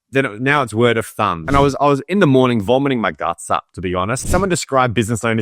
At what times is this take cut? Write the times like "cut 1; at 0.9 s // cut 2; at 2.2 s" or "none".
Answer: cut 1; at 1.4 s // cut 2; at 4.2 s